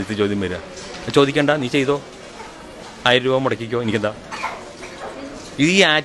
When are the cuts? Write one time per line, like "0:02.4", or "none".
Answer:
none